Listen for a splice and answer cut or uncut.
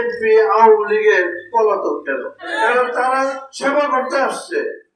cut